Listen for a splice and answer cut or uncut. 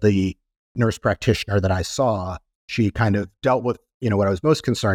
uncut